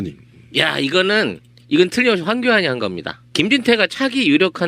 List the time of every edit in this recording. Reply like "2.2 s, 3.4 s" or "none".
none

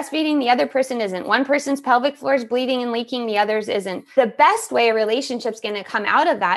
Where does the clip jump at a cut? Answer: 4.1 s

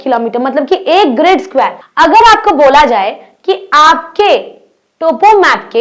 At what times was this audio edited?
1.8 s

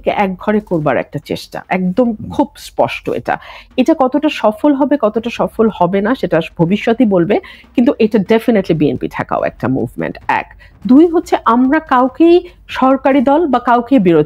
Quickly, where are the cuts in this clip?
none

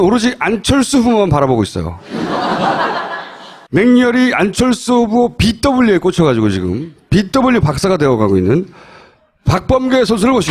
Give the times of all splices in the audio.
none

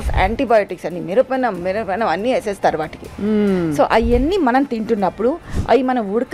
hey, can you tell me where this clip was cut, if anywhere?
none

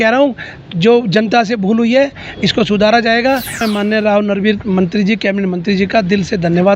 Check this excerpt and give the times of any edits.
3.6 s

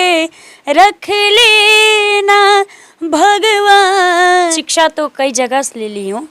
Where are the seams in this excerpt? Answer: 4.5 s

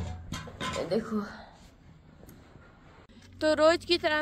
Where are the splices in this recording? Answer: 3.1 s

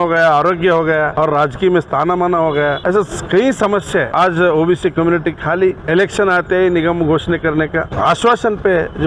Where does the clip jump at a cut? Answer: 1.1 s, 2.8 s, 4.1 s, 5.8 s, 7.9 s

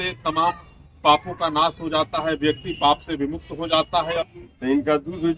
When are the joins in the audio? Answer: 4.2 s

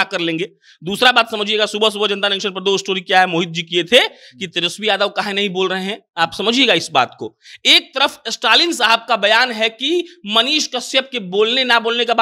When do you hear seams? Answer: none

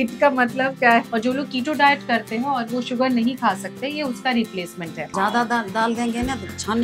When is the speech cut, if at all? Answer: 1.1 s, 5.1 s

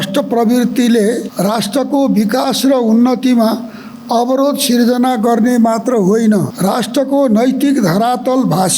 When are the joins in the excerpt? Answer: 1.3 s, 6.5 s

